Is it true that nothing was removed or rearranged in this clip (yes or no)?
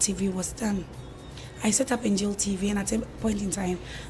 yes